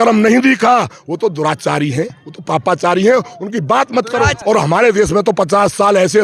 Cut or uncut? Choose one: cut